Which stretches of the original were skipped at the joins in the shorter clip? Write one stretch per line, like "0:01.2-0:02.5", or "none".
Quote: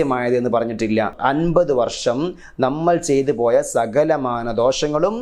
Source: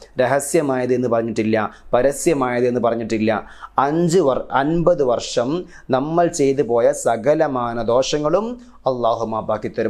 0:03.5-0:04.5

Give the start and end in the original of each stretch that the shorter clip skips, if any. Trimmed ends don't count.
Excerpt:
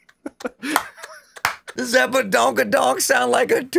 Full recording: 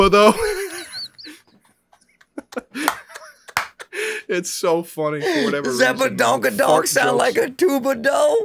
0:03.9-0:05.7

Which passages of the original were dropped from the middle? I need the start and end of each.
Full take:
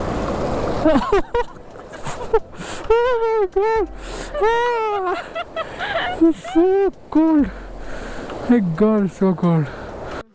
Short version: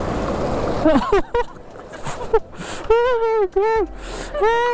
none

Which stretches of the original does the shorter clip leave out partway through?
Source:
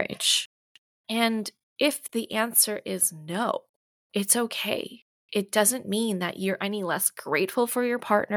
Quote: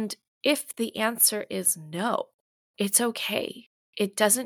none

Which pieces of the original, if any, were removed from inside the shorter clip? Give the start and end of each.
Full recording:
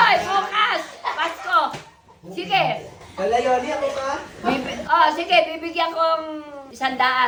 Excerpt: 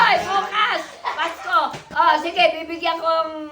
0:01.8-0:04.8

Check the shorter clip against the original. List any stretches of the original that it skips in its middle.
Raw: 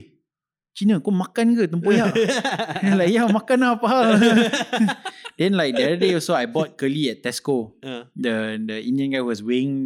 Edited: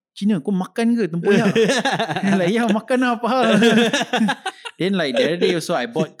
none

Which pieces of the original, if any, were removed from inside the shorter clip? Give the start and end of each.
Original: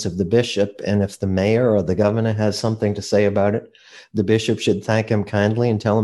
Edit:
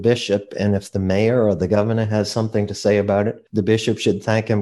0:03.7-0:04.0

